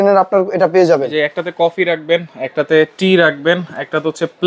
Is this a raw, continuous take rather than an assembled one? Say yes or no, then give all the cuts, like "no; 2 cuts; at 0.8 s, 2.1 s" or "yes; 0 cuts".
yes; 0 cuts